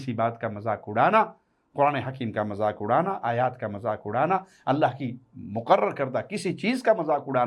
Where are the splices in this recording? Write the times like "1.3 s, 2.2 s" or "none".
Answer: none